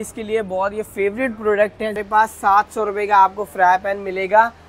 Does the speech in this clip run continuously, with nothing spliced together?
no; 1 cut; at 2.0 s

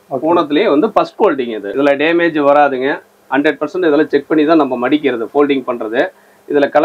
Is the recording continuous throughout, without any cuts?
no; 1 cut; at 1.6 s

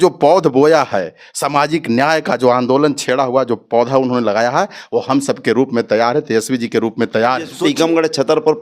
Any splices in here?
yes; 1 cut; at 7.5 s

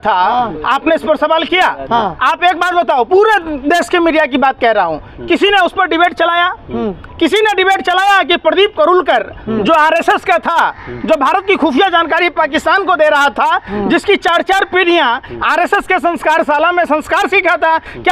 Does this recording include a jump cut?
no; 0 cuts

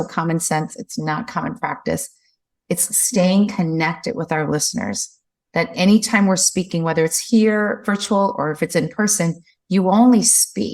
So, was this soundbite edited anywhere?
no; 0 cuts

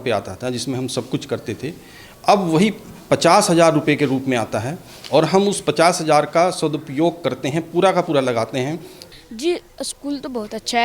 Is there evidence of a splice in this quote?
yes; 1 cut; at 8.9 s

